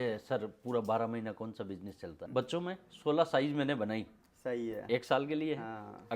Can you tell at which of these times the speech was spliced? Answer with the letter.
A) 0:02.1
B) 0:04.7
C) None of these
A